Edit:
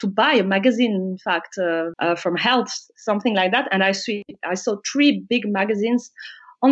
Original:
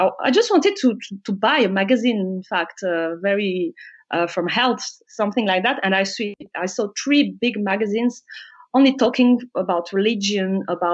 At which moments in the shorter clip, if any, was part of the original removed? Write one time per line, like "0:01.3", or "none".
0:01.9